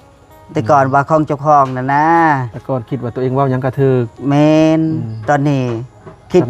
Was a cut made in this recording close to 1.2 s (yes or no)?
no